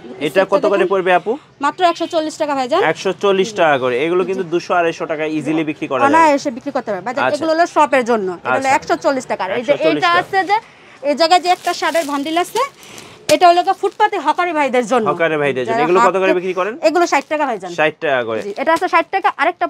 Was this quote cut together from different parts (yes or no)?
no